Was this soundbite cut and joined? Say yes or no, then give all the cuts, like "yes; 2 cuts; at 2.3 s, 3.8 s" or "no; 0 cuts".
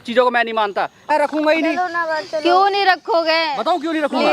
yes; 1 cut; at 1.0 s